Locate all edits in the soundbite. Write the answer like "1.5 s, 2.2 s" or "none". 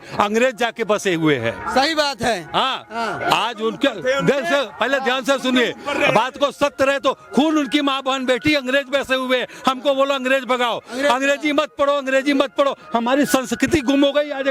none